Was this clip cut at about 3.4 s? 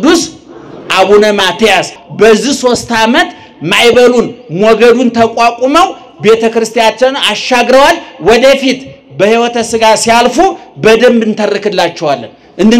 no; 1 cut; at 2.0 s

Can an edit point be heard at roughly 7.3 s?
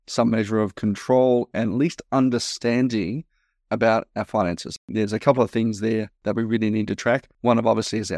yes; 3 cuts; at 4.9 s, 6.1 s, 7.3 s

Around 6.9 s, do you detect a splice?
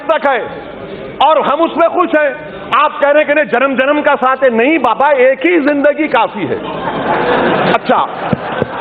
no; 0 cuts

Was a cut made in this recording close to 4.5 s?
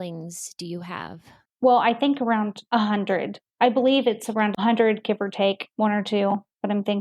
yes; 2 cuts; at 1.4 s, 4.5 s

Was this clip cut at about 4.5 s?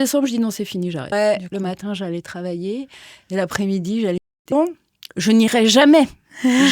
yes; 2 cuts; at 1.1 s, 4.5 s

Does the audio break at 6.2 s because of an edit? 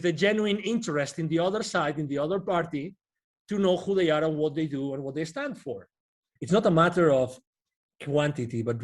yes; 1 cut; at 6.2 s

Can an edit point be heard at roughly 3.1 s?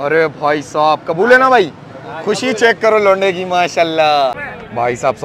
no; 1 cut; at 4.3 s

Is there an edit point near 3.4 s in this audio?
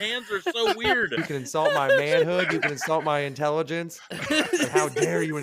no; 1 cut; at 1.2 s

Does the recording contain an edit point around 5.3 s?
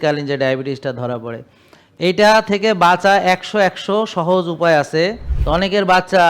yes; 1 cut; at 5.3 s

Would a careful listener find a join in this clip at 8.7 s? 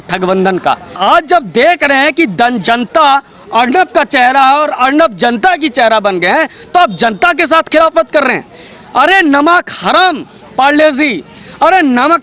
no; 1 cut; at 0.9 s

